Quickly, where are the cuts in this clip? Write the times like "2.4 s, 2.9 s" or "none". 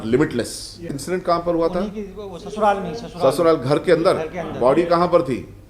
1.0 s